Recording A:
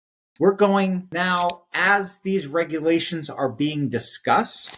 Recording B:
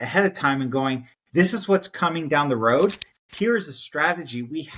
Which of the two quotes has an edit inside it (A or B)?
A